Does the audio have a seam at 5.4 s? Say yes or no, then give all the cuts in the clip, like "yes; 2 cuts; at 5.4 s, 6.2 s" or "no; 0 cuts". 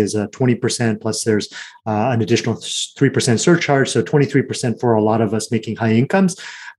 no; 0 cuts